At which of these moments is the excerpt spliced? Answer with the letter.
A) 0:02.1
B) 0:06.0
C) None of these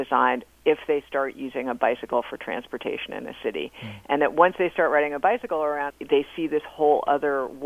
B